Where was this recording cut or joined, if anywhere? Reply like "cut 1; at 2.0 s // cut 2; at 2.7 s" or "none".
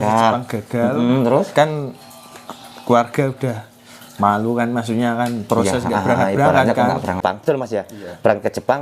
cut 1; at 7.2 s